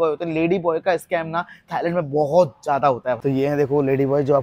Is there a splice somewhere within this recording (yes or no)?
yes